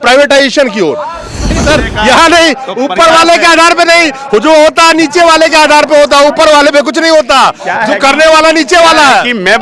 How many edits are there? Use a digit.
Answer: 1